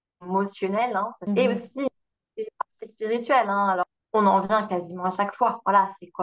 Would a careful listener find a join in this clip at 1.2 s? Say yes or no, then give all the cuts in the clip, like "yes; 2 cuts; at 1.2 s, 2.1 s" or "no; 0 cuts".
yes; 2 cuts; at 1.2 s, 3.8 s